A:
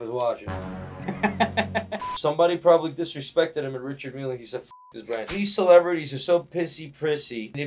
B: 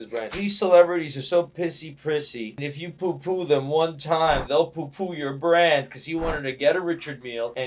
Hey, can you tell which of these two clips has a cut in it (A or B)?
A